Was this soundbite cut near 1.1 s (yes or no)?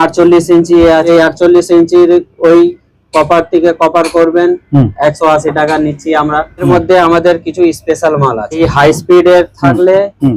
yes